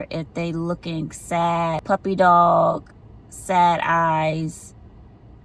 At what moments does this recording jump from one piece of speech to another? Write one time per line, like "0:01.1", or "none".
0:01.8